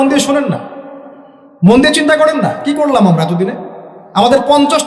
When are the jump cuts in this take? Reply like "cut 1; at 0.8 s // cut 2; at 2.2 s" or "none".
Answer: none